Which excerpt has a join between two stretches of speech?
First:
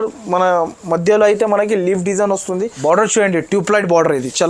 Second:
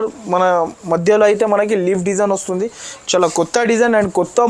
first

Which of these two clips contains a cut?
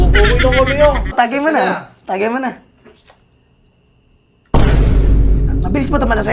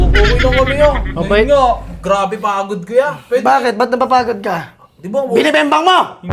first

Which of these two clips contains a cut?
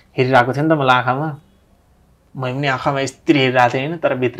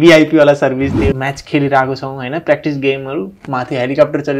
second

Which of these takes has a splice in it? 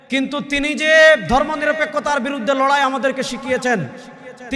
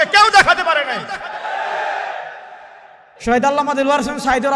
second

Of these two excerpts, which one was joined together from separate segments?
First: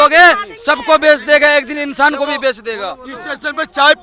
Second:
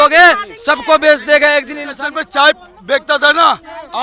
second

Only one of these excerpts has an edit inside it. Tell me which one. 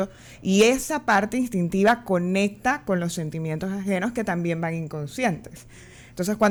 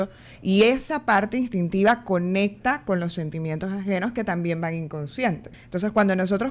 second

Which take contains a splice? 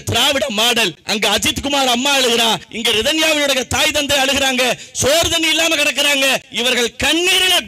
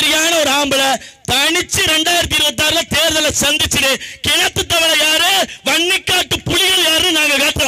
first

